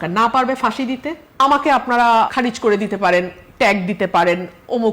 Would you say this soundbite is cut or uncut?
cut